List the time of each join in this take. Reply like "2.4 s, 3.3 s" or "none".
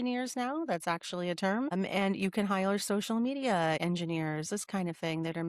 1.7 s, 3.8 s